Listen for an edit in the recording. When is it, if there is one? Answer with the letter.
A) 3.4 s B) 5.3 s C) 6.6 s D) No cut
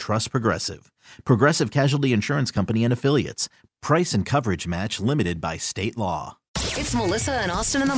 C